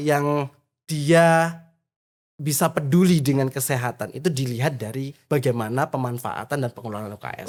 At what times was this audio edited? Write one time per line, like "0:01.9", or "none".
none